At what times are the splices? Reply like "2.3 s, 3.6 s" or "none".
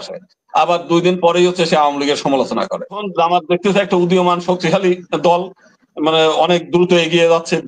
3.1 s